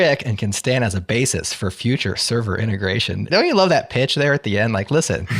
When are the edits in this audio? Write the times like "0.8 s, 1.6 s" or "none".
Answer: 3.2 s